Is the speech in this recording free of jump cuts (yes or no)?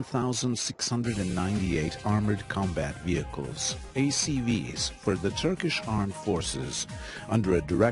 no